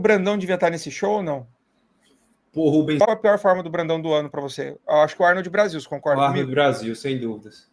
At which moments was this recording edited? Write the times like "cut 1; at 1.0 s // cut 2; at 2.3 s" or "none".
cut 1; at 3.0 s